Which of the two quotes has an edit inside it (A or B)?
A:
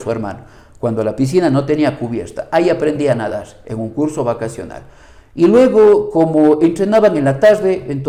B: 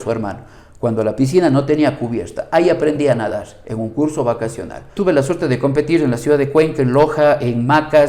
B